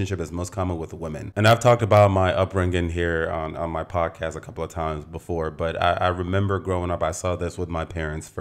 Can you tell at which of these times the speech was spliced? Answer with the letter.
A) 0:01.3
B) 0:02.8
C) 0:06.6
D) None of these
D